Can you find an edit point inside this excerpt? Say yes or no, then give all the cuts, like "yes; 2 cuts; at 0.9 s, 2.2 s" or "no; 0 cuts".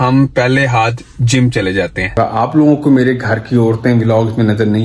yes; 1 cut; at 2.2 s